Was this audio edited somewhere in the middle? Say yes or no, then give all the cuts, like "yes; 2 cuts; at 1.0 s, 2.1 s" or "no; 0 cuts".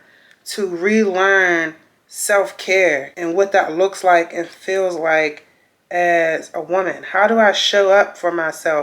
yes; 1 cut; at 3.1 s